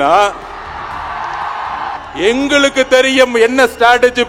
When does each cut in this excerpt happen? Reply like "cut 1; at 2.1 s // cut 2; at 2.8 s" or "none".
cut 1; at 2.0 s